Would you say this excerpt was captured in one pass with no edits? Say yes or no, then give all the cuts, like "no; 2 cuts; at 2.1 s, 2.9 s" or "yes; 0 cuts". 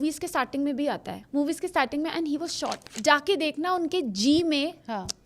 no; 2 cuts; at 1.2 s, 2.9 s